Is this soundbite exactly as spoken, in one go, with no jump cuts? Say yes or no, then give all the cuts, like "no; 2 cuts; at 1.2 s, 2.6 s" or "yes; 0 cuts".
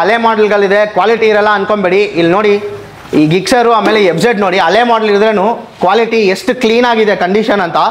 yes; 0 cuts